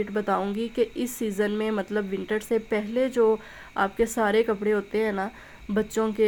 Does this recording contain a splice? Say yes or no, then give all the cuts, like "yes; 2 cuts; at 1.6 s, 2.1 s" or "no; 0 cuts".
no; 0 cuts